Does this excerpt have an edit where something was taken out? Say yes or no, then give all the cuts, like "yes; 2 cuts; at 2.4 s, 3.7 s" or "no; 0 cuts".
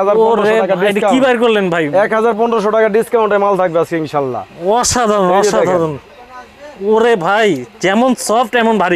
no; 0 cuts